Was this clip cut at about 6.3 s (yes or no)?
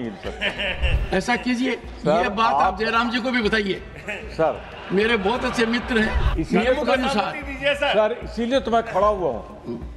yes